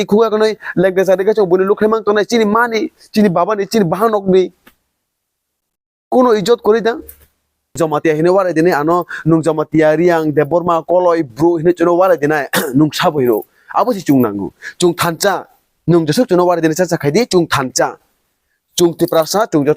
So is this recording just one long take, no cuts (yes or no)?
no